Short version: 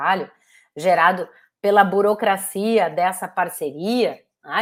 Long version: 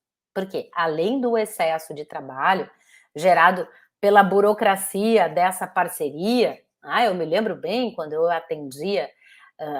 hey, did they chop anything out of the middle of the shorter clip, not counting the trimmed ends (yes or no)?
no